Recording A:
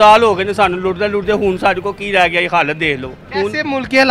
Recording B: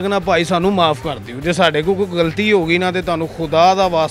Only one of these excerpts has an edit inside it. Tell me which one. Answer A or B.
A